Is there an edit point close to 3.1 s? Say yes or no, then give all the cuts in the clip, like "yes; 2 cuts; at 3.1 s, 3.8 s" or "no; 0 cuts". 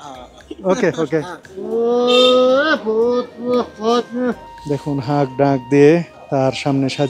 no; 3 cuts; at 1.5 s, 4.5 s, 6.2 s